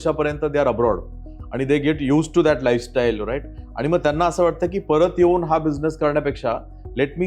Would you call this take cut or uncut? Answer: uncut